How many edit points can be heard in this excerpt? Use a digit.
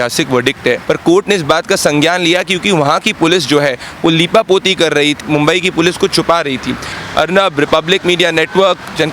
3